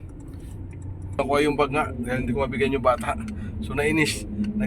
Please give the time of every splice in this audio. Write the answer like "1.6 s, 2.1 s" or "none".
1.2 s